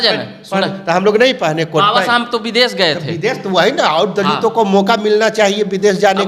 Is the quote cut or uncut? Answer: uncut